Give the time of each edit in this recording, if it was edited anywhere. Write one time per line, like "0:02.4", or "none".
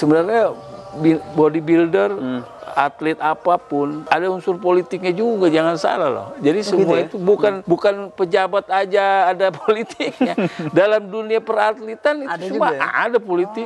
0:04.0
0:07.6